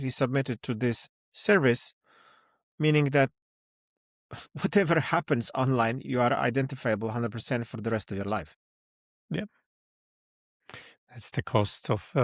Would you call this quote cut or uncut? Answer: uncut